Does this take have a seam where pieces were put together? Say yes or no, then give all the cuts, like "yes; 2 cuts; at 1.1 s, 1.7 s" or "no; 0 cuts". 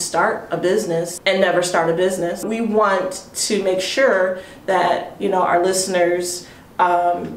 yes; 2 cuts; at 1.1 s, 2.4 s